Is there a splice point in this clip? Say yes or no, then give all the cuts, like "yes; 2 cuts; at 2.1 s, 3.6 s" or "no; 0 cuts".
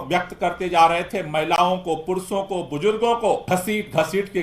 yes; 1 cut; at 3.4 s